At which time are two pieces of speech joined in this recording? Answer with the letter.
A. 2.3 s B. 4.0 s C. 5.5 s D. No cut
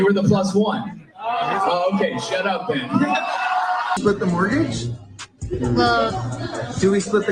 B